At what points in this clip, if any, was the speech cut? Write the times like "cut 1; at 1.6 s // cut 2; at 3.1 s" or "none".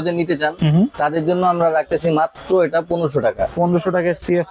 cut 1; at 3.5 s